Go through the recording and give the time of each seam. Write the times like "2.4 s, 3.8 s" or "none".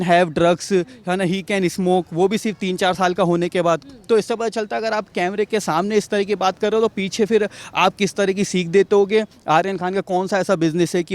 9.4 s